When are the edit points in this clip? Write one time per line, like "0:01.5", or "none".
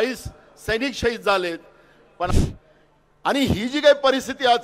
0:02.3